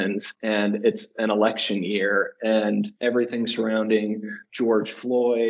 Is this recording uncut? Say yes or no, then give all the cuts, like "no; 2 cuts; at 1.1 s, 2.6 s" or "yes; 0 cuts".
yes; 0 cuts